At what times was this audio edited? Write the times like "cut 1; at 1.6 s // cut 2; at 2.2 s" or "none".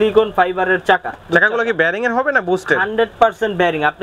none